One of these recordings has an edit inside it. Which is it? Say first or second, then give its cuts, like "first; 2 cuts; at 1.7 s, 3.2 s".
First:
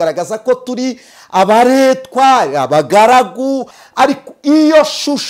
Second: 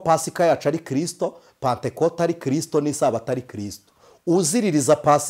first; 1 cut; at 3.8 s